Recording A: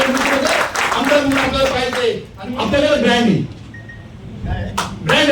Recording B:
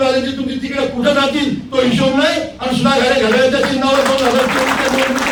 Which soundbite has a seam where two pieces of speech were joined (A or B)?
A